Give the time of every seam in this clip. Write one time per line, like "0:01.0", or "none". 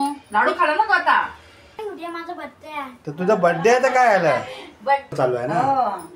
0:01.8
0:05.1